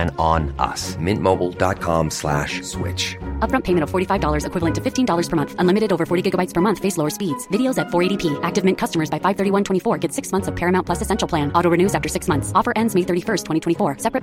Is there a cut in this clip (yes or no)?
no